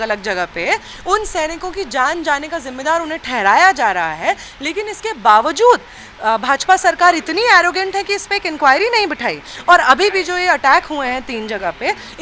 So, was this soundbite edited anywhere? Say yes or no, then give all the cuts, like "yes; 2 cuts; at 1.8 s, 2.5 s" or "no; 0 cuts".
no; 0 cuts